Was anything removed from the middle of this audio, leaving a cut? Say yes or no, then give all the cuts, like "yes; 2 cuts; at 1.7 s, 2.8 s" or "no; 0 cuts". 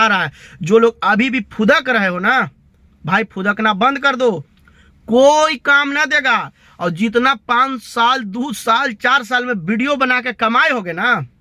no; 0 cuts